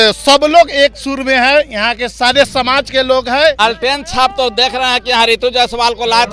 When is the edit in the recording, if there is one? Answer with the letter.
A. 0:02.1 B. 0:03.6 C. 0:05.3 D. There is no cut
B